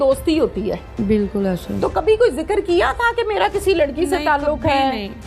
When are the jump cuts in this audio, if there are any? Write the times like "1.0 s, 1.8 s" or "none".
1.0 s